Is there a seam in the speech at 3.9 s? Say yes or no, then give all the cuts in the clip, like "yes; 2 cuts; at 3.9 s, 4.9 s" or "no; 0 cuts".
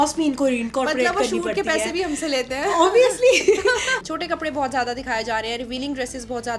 yes; 1 cut; at 3.9 s